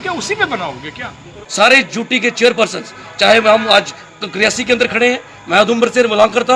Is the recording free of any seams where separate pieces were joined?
no; 1 cut; at 1.4 s

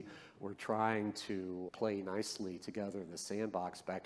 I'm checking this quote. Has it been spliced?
yes; 1 cut; at 1.7 s

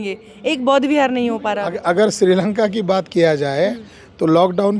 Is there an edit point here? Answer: no; 0 cuts

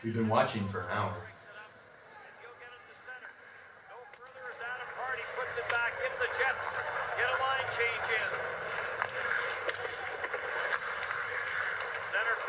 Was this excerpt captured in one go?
no; 1 cut; at 1.3 s

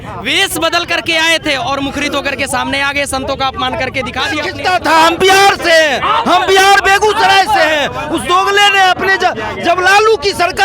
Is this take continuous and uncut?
no; 1 cut; at 4.5 s

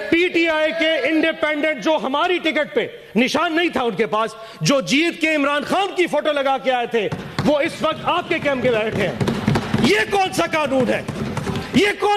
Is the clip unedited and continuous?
yes; 0 cuts

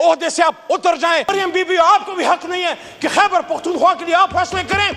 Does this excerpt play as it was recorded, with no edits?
no; 1 cut; at 1.3 s

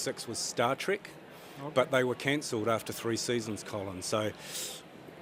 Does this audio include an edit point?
no; 0 cuts

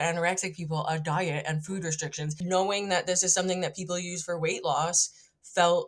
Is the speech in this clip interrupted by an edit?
yes; 1 cut; at 2.4 s

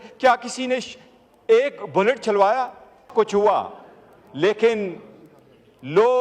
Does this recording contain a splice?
yes; 1 cut; at 3.1 s

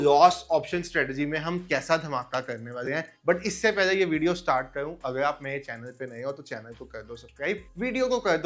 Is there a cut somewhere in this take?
no; 0 cuts

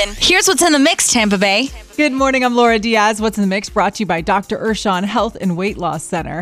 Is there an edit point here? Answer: yes; 1 cut; at 1.8 s

